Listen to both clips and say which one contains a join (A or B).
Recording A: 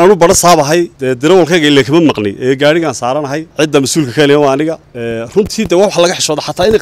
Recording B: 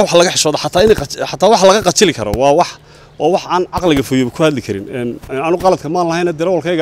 A